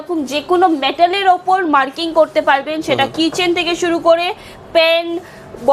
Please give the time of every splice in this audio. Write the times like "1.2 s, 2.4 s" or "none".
none